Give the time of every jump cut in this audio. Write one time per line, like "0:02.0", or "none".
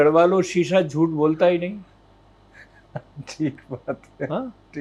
none